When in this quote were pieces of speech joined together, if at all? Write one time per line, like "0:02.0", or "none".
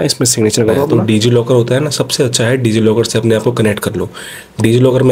0:01.0